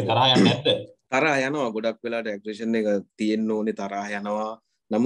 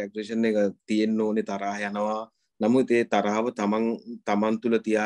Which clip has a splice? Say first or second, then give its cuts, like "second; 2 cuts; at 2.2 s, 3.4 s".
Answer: first; 1 cut; at 0.9 s